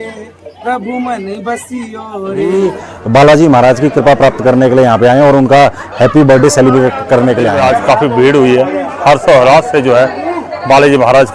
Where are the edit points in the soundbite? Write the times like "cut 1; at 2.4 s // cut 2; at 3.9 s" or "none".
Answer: cut 1; at 2.6 s // cut 2; at 7.6 s